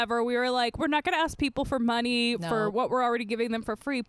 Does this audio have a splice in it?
no; 0 cuts

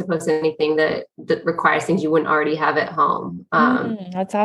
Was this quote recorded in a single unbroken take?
yes; 0 cuts

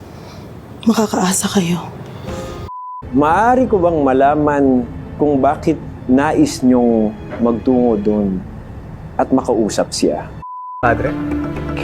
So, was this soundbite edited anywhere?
yes; 2 cuts; at 2.7 s, 10.8 s

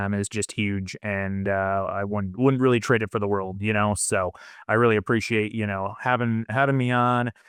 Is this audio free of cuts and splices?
yes; 0 cuts

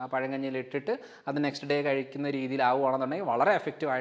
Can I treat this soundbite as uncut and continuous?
yes; 0 cuts

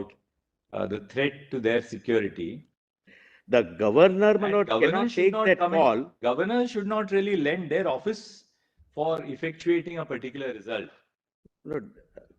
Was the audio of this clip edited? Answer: yes; 1 cut; at 3.1 s

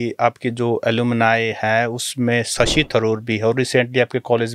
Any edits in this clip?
no; 0 cuts

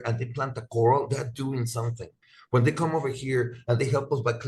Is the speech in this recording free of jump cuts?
yes; 0 cuts

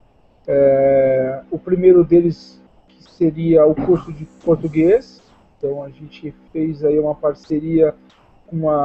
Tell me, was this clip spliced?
no; 0 cuts

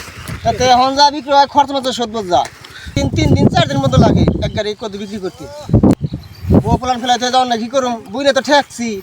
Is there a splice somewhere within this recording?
yes; 2 cuts; at 3.0 s, 6.0 s

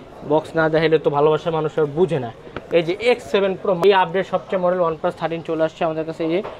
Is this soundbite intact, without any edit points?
no; 1 cut; at 3.8 s

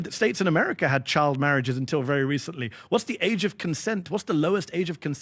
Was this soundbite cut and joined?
no; 0 cuts

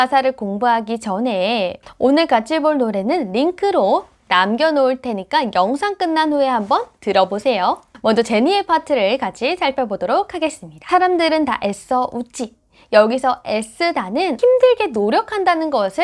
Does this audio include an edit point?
yes; 1 cut; at 7.9 s

